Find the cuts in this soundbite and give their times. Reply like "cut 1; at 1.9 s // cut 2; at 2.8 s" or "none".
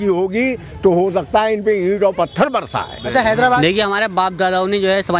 cut 1; at 3.6 s